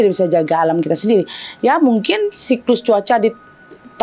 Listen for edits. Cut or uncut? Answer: uncut